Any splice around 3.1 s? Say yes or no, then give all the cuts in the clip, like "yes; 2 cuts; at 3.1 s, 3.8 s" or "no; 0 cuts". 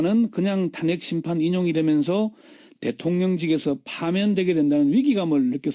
no; 1 cut; at 1.0 s